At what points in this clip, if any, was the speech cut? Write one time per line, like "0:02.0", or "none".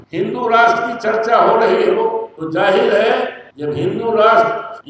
none